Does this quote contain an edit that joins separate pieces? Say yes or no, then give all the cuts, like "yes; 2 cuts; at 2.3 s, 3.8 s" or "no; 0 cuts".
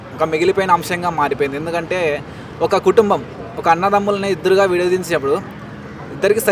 no; 0 cuts